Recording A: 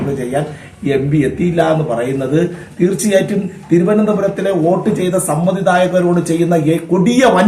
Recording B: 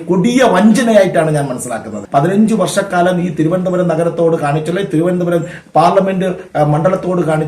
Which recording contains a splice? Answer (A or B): B